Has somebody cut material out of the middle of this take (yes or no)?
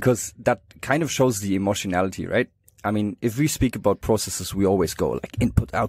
no